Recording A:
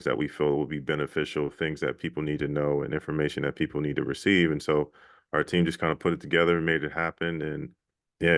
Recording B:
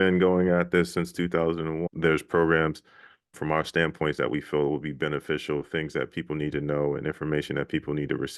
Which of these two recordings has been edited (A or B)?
B